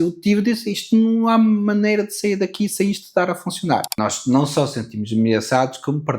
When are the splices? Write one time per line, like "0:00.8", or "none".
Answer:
0:03.9